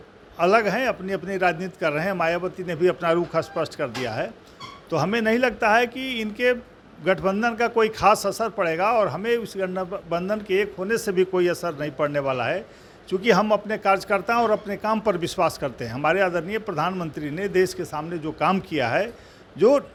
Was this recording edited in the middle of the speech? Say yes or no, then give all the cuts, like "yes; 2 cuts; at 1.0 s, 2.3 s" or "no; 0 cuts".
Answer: no; 0 cuts